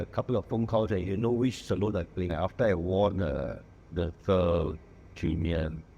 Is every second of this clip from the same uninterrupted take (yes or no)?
no